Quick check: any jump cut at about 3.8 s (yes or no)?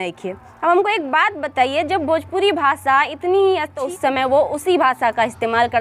yes